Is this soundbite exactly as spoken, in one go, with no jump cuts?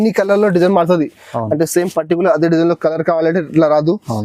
yes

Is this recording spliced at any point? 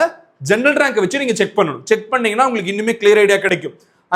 no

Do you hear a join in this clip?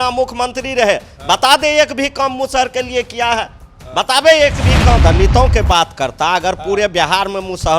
yes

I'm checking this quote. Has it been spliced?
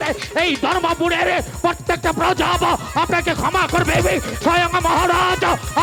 no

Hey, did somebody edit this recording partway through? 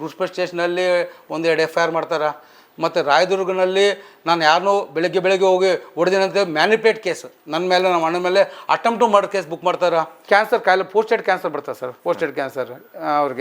yes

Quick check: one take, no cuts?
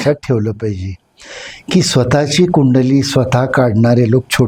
yes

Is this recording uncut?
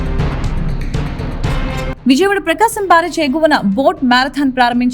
no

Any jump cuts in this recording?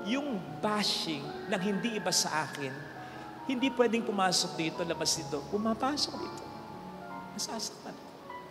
no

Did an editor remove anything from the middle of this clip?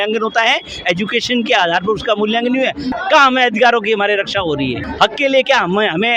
yes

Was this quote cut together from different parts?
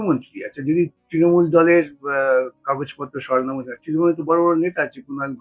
no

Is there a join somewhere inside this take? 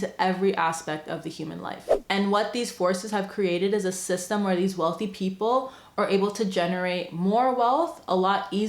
yes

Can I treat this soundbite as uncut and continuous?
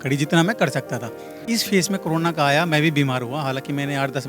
no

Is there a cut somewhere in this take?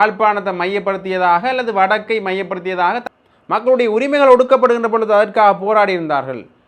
yes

